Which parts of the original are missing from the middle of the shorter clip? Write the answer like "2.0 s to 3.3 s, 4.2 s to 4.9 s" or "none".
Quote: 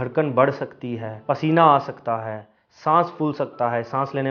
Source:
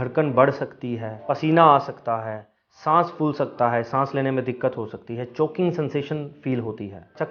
none